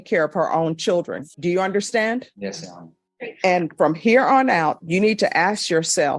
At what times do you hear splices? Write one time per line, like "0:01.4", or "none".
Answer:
none

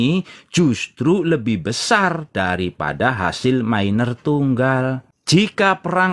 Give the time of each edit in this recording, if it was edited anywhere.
0:05.1

